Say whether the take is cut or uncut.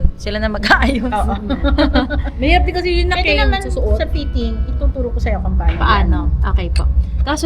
uncut